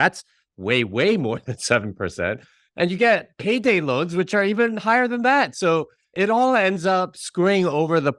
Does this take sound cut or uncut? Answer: cut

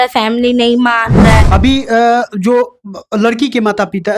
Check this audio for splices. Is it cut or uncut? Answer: cut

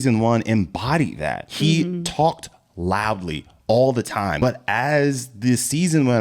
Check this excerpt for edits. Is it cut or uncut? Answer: cut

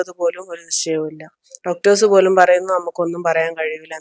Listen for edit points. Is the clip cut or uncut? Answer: uncut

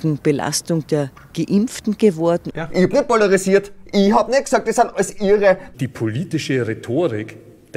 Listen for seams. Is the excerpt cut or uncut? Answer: cut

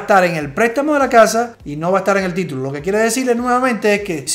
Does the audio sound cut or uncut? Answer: uncut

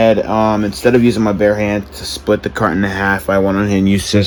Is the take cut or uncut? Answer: uncut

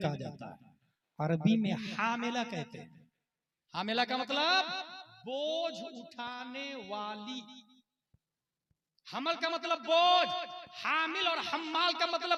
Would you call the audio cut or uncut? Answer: uncut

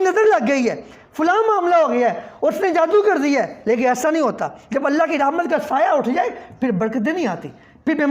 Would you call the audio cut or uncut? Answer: uncut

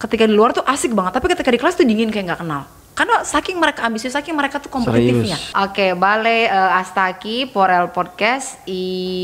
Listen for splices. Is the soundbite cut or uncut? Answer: cut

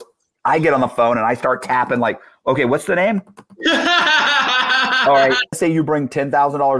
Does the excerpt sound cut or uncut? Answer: cut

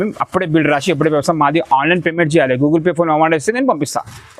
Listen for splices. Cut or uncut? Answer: uncut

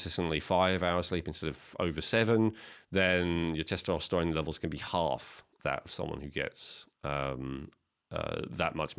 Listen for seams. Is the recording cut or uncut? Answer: uncut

